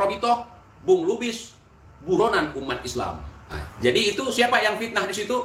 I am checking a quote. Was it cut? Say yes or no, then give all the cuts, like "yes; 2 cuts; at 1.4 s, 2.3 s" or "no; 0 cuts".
yes; 1 cut; at 3.5 s